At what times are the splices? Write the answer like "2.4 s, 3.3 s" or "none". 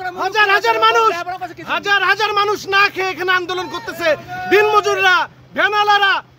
none